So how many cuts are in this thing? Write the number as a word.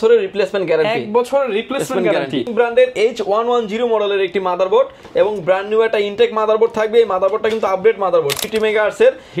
two